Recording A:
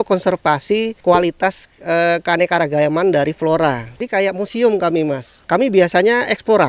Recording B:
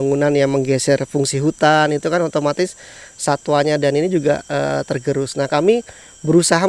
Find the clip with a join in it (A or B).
A